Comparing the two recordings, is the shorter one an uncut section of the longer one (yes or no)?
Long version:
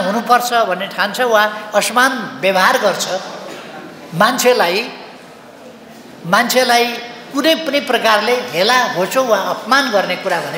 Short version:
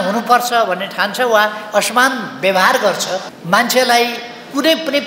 no